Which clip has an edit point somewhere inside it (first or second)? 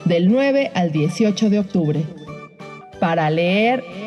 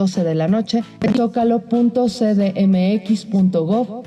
second